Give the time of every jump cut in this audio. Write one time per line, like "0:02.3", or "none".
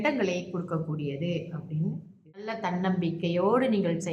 0:02.6